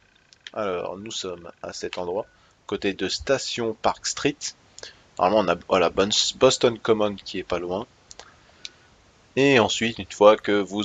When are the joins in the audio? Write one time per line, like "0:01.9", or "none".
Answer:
0:01.4